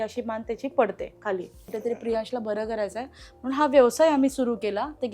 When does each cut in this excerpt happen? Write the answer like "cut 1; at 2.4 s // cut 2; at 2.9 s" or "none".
cut 1; at 1.7 s